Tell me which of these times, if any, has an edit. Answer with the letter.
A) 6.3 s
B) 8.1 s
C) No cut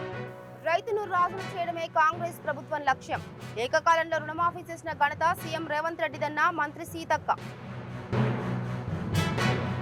C